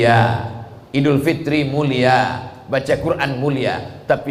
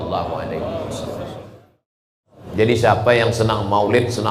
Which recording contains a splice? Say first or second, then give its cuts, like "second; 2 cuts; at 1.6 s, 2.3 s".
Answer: second; 1 cut; at 2.1 s